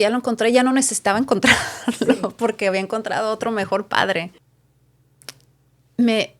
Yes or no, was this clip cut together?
yes